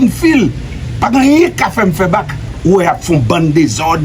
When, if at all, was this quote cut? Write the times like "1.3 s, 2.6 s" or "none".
2.4 s